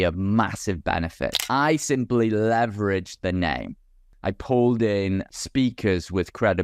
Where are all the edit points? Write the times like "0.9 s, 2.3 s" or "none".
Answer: 1.4 s, 4.0 s, 5.3 s